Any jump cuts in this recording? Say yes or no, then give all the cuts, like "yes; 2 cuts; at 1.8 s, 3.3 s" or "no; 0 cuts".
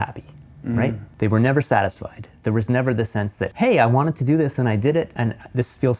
yes; 3 cuts; at 1.0 s, 3.4 s, 5.1 s